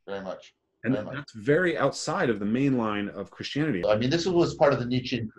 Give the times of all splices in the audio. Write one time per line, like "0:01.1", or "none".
0:03.8